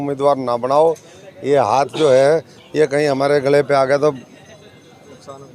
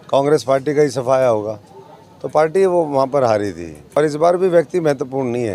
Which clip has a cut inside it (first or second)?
second